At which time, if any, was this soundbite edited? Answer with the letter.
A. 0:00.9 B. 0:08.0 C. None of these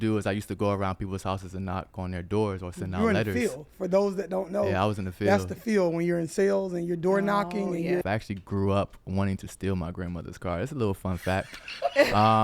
B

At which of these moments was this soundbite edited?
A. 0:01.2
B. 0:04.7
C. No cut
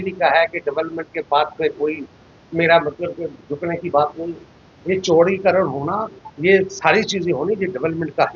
B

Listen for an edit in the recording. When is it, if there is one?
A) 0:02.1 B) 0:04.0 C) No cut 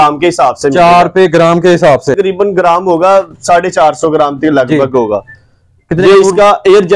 A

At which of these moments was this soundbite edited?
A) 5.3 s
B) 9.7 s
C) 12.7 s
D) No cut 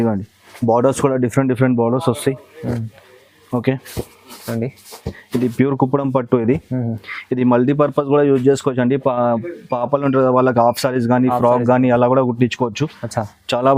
D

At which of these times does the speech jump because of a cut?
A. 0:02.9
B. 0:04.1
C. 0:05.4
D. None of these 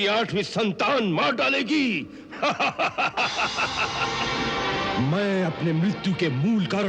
B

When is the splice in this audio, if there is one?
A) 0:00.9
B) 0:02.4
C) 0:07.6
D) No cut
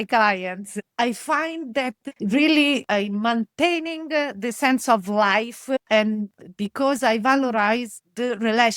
A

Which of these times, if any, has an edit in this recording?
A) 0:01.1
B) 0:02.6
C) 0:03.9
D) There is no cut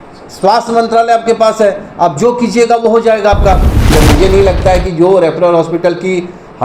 C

